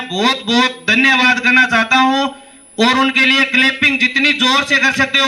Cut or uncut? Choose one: uncut